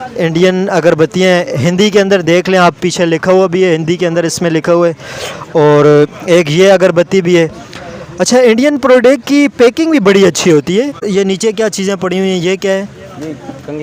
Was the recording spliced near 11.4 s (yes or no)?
no